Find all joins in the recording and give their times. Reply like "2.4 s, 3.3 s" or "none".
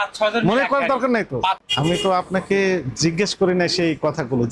1.6 s